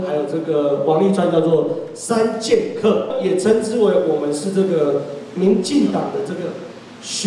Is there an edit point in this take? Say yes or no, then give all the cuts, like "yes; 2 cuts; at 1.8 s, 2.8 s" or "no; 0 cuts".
yes; 1 cut; at 3.1 s